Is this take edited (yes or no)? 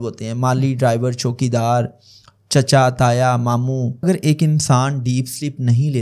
yes